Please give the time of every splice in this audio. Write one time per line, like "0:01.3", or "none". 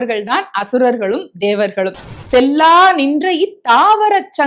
0:02.1